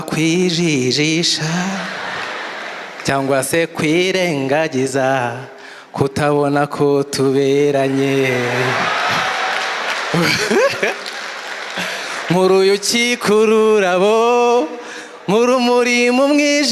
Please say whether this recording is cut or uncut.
uncut